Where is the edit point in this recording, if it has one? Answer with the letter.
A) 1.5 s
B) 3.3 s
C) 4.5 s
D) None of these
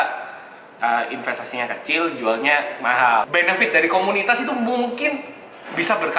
B